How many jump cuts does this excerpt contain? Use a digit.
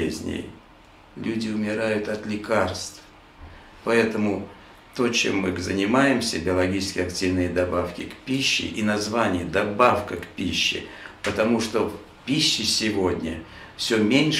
0